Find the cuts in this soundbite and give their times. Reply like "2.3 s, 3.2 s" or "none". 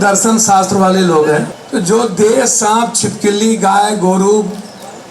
1.6 s